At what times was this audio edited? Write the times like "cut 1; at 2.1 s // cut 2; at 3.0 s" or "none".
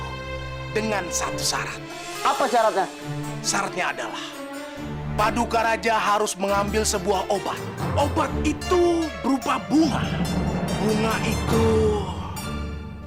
none